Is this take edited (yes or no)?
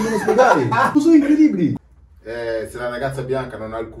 yes